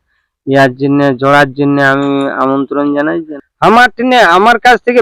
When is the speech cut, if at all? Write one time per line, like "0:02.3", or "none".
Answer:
0:03.3